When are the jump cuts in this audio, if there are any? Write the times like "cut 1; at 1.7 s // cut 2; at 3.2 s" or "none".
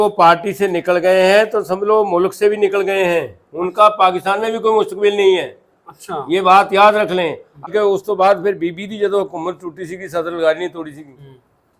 cut 1; at 7.7 s